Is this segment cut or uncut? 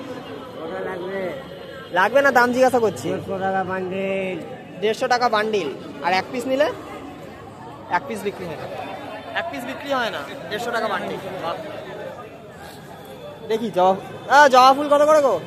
uncut